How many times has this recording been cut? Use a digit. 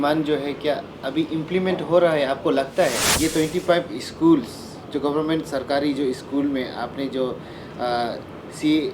1